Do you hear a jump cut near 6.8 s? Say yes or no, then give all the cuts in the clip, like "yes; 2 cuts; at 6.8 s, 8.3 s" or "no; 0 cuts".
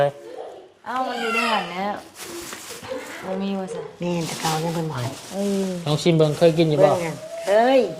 no; 1 cut; at 3.9 s